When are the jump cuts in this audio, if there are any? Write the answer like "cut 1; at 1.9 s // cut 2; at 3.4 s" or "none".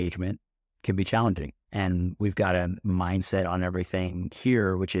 none